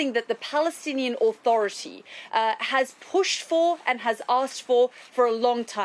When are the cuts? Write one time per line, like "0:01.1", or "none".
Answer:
none